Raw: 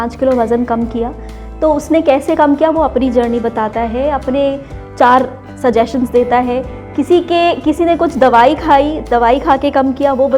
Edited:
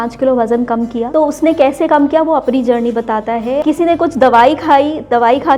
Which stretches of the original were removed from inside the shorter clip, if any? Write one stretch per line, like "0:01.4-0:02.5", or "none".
0:01.1-0:01.5
0:04.1-0:07.6